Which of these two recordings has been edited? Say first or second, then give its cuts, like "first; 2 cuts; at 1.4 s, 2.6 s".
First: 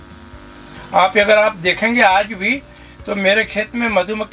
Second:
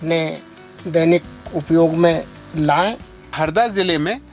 second; 1 cut; at 3.3 s